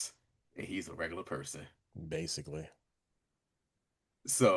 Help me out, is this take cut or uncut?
uncut